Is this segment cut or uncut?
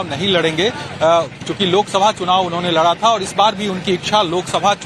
cut